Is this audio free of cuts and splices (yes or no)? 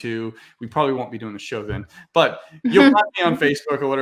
yes